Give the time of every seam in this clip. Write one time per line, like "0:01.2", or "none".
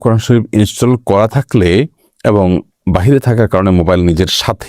none